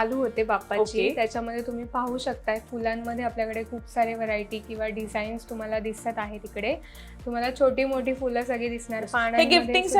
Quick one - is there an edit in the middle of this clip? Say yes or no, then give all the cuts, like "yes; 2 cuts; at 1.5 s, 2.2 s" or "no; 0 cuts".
no; 0 cuts